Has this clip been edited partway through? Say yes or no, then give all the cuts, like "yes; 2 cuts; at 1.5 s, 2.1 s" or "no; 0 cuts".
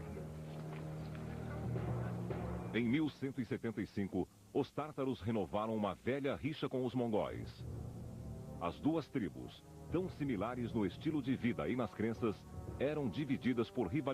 yes; 1 cut; at 6.2 s